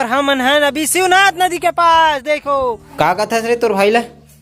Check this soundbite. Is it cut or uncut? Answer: cut